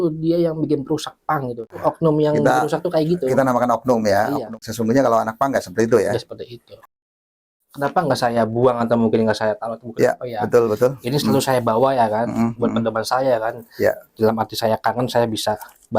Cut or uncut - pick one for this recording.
cut